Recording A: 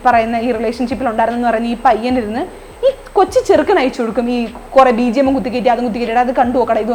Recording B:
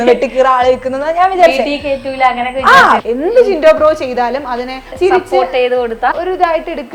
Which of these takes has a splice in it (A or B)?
B